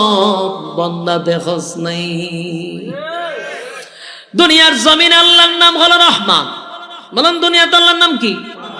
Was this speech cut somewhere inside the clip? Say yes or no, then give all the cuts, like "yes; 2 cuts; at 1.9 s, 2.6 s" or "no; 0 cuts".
no; 0 cuts